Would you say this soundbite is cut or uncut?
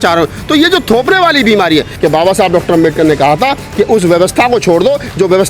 cut